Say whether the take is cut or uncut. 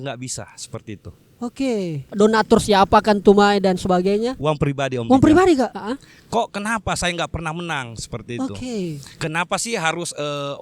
cut